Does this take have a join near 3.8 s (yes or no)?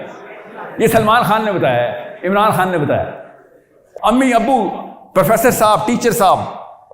yes